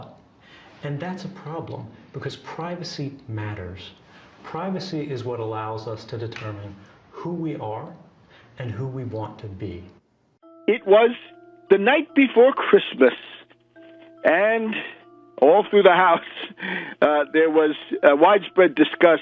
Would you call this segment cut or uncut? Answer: cut